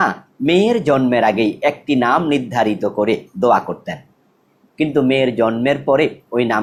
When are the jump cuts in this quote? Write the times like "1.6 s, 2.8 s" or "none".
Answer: none